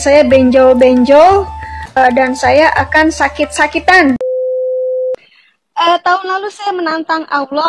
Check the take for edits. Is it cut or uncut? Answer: cut